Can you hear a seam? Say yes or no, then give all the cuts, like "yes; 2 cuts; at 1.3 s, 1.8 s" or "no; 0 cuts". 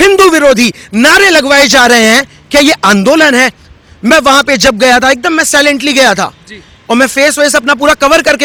no; 0 cuts